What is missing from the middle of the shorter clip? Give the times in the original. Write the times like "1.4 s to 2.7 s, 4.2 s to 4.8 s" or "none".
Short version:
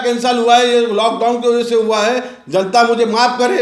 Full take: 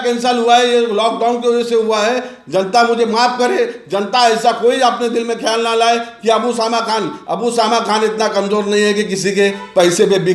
none